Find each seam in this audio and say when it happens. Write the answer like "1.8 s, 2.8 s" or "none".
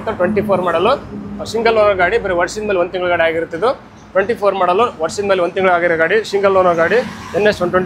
none

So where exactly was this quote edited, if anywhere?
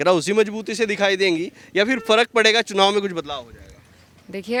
none

